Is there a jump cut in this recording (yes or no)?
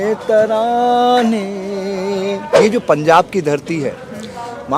yes